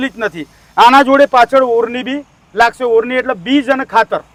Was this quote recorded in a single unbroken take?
yes; 0 cuts

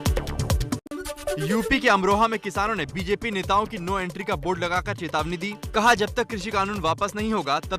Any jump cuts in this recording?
yes; 1 cut; at 1.3 s

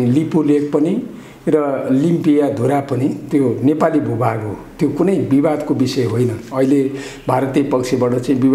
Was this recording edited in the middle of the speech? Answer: no; 0 cuts

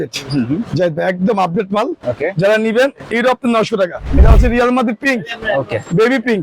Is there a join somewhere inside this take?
yes; 1 cut; at 4.2 s

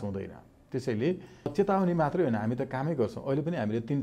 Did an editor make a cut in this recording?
yes; 1 cut; at 1.5 s

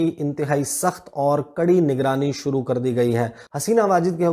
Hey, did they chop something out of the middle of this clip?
yes; 1 cut; at 3.4 s

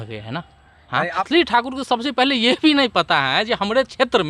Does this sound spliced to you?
yes; 1 cut; at 1.2 s

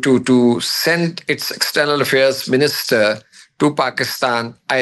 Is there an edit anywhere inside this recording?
no; 0 cuts

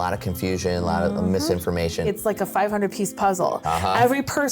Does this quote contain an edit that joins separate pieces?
yes; 1 cut; at 2.1 s

